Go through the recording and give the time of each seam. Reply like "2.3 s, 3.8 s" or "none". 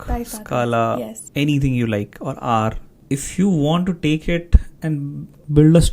1.2 s, 2.9 s, 4.9 s